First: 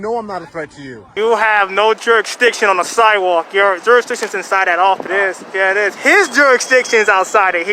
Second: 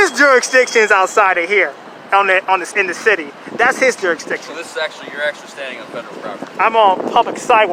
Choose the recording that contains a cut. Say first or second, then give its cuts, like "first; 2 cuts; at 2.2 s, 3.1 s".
first; 2 cuts; at 1.0 s, 5.0 s